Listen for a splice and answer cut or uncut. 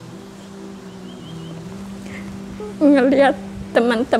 cut